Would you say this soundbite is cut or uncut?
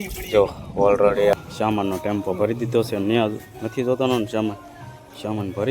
cut